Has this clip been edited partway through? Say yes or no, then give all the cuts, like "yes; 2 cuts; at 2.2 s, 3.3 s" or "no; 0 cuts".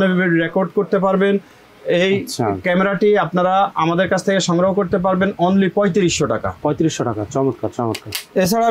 no; 0 cuts